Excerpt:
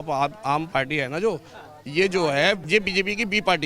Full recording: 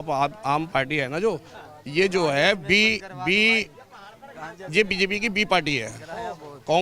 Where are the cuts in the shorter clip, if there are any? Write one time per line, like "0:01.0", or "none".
0:02.6

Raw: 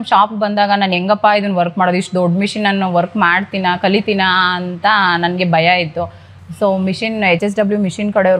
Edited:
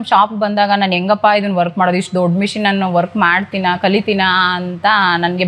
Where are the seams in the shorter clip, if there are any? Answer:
none

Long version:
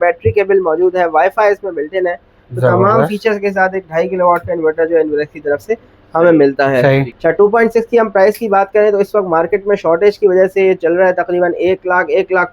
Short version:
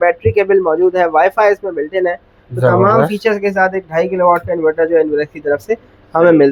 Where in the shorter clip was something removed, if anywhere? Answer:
none

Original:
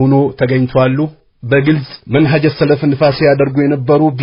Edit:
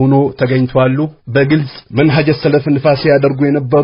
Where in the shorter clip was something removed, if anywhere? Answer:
0:01.2

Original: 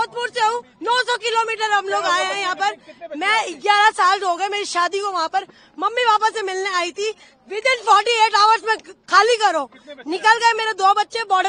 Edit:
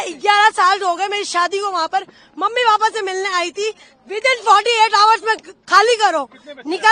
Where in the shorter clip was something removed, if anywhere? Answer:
none

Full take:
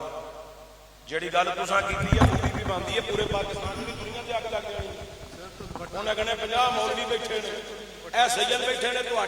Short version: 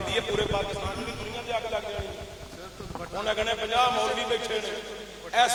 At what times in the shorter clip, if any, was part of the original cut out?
none

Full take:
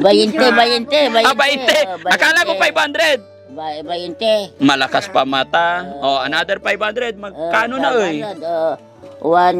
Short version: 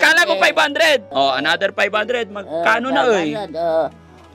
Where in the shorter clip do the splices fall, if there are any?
0:01.1

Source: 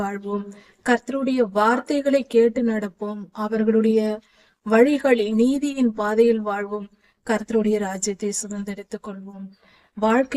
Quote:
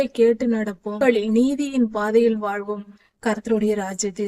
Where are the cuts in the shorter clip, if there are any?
0:01.0

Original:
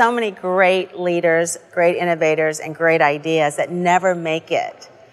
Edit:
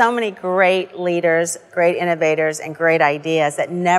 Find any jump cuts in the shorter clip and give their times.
none

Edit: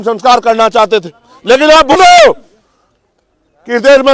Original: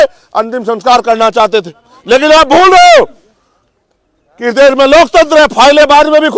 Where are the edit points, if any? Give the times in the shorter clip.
0:02.0

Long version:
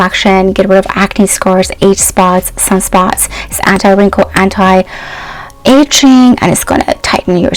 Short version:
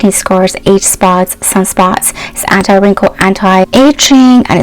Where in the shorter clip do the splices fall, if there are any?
0:03.7

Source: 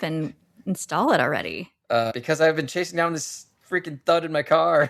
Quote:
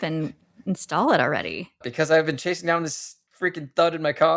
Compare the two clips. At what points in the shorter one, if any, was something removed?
0:01.8

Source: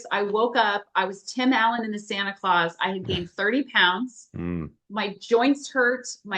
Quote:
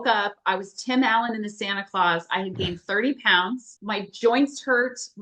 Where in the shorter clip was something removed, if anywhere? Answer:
0:03.7

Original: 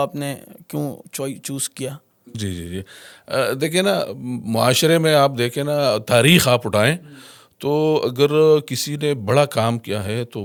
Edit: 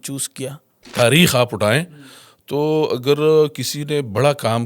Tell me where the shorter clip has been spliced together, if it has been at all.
0:00.9

